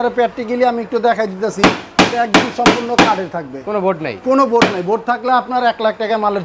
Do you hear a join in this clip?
no; 0 cuts

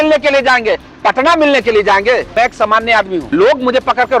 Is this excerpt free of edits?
no; 2 cuts; at 2.3 s, 3.3 s

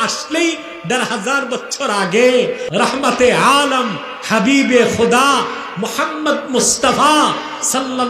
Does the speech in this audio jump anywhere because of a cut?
yes; 1 cut; at 2.6 s

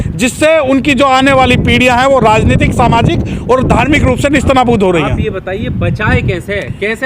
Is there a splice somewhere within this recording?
no; 0 cuts

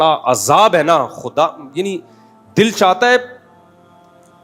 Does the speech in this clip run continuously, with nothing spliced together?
yes; 0 cuts

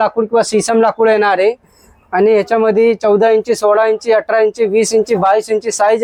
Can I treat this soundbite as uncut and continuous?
yes; 0 cuts

